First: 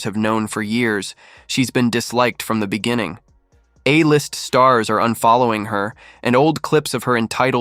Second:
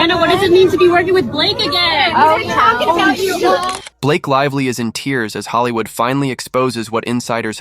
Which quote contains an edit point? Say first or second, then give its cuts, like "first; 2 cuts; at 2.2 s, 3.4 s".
second; 1 cut; at 3.9 s